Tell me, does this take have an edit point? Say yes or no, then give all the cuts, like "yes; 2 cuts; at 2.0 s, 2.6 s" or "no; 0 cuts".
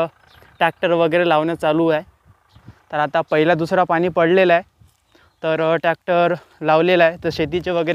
no; 0 cuts